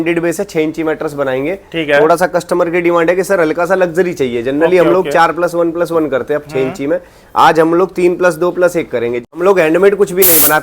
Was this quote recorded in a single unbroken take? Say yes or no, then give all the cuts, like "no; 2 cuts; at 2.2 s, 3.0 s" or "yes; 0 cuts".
no; 1 cut; at 9.3 s